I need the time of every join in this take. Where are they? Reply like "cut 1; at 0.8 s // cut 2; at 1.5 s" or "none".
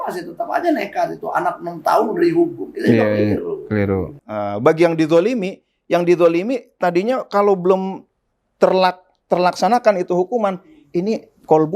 cut 1; at 4.2 s